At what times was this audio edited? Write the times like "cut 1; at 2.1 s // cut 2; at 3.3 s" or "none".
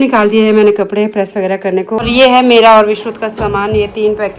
cut 1; at 2.0 s